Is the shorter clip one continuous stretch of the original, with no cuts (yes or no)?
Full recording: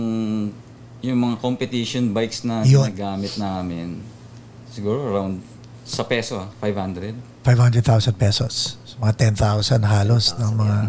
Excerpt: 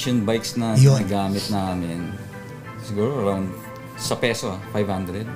yes